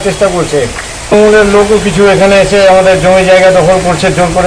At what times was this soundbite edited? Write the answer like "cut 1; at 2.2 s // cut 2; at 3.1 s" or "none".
cut 1; at 1.1 s